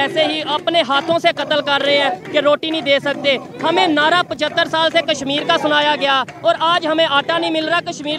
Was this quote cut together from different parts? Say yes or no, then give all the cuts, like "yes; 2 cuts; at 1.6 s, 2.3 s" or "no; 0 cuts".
no; 0 cuts